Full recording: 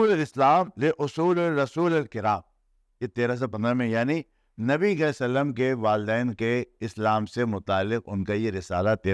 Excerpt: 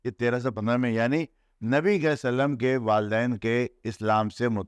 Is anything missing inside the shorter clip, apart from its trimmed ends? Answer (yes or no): no